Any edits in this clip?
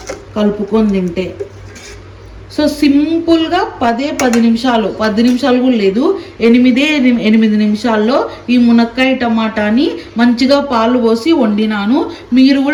no; 0 cuts

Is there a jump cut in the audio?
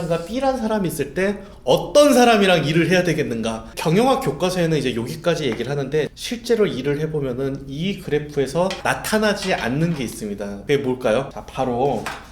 yes; 5 cuts; at 3.7 s, 6.1 s, 8.8 s, 10.5 s, 11.4 s

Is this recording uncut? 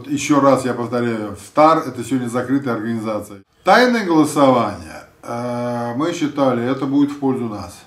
no; 1 cut; at 3.3 s

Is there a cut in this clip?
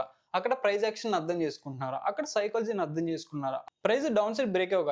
yes; 1 cut; at 3.6 s

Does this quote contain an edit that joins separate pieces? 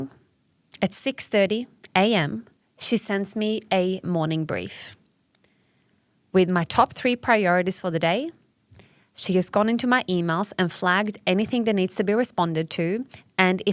no; 0 cuts

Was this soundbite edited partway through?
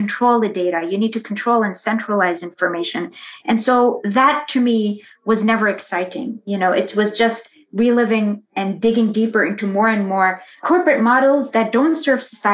yes; 2 cuts; at 8.5 s, 10.6 s

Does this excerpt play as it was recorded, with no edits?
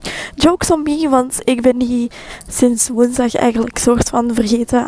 yes; 0 cuts

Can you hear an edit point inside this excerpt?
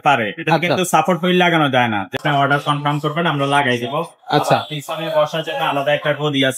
yes; 1 cut; at 2.2 s

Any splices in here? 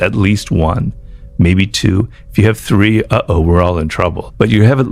no; 0 cuts

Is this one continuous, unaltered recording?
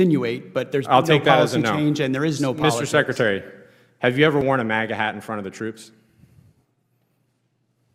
yes; 0 cuts

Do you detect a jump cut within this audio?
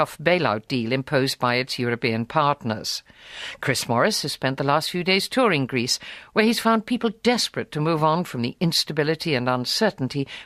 yes; 1 cut; at 6.2 s

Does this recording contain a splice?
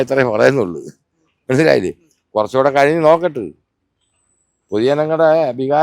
no; 0 cuts

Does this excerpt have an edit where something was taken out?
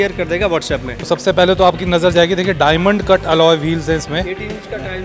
yes; 1 cut; at 0.9 s

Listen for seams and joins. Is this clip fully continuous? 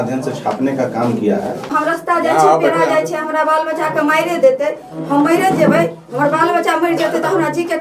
no; 1 cut; at 1.7 s

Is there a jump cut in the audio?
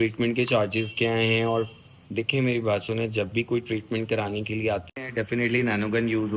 yes; 1 cut; at 4.8 s

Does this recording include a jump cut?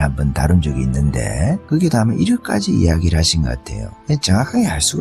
yes; 1 cut; at 1.6 s

